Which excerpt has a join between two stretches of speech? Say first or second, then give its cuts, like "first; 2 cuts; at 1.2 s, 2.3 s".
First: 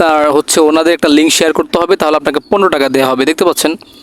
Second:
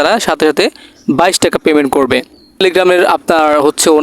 second; 1 cut; at 2.4 s